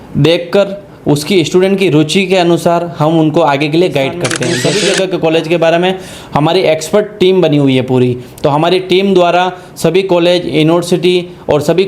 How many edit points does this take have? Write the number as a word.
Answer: one